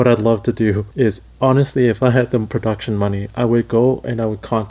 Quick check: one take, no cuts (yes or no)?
no